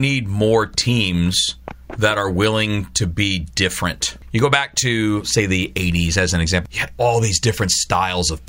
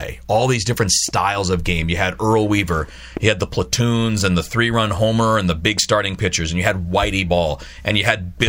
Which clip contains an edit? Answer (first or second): first